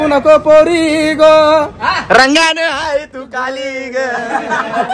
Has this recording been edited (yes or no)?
no